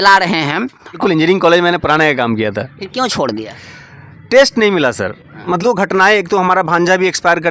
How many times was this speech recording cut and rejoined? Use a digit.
2